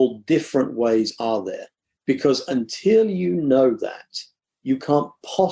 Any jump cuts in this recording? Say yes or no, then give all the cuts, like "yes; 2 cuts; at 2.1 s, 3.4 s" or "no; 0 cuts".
yes; 1 cut; at 1.9 s